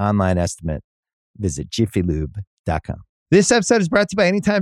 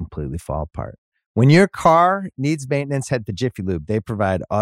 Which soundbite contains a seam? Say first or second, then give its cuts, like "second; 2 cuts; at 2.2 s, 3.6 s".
first; 1 cut; at 3.0 s